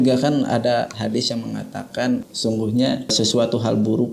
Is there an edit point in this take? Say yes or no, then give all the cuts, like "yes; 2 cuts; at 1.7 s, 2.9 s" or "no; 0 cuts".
yes; 2 cuts; at 2.3 s, 3.1 s